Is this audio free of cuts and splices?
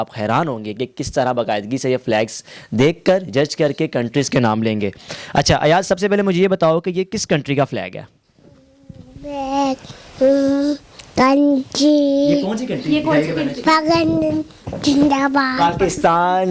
yes; 0 cuts

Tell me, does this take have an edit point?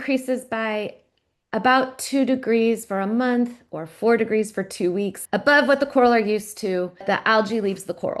yes; 2 cuts; at 5.2 s, 7.0 s

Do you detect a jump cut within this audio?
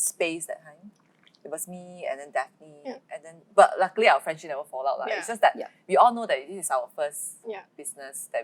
no; 0 cuts

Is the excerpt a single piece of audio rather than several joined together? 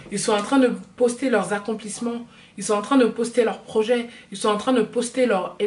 yes; 0 cuts

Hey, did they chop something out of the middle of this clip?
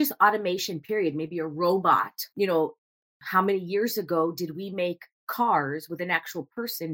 yes; 1 cut; at 2.3 s

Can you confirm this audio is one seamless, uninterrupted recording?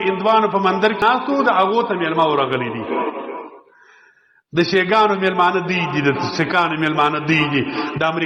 no; 1 cut; at 1.0 s

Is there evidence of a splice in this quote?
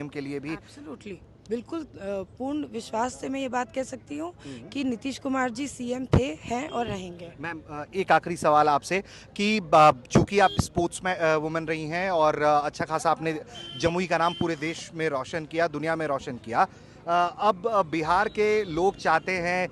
no; 0 cuts

